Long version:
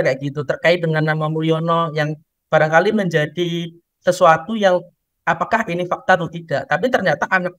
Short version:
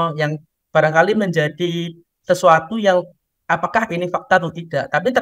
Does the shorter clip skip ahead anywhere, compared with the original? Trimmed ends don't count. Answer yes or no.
no